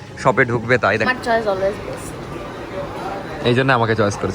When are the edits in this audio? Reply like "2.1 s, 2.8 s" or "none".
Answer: 1.1 s